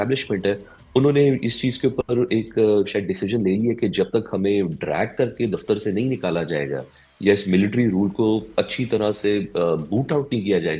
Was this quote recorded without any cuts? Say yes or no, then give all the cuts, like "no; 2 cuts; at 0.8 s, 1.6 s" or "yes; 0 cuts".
yes; 0 cuts